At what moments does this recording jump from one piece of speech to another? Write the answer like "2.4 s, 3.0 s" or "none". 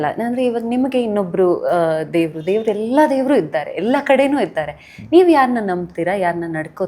none